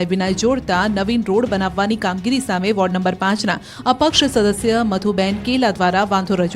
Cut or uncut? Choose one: cut